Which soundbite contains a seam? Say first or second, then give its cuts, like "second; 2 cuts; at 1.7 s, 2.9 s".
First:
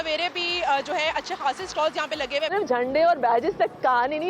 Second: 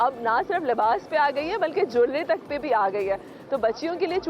first; 1 cut; at 2.5 s